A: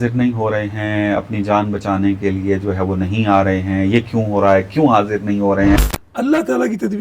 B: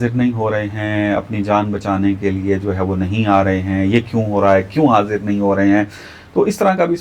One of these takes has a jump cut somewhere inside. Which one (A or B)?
A